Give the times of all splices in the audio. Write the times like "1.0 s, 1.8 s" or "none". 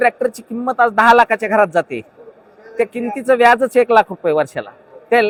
none